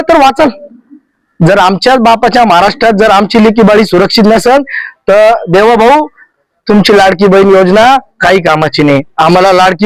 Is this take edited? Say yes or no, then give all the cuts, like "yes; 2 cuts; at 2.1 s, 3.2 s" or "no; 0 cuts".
no; 0 cuts